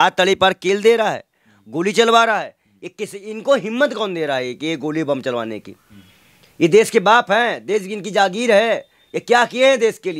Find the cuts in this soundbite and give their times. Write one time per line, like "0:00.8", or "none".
none